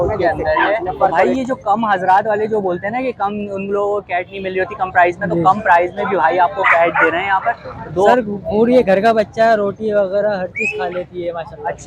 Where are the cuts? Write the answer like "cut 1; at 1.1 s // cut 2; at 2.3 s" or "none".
cut 1; at 1.2 s // cut 2; at 8.1 s